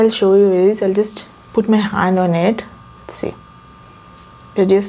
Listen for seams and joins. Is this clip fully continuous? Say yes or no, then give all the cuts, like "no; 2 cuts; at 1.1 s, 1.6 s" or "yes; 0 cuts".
yes; 0 cuts